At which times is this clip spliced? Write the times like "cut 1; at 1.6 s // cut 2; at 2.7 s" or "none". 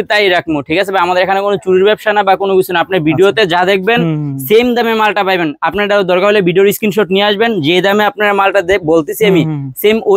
none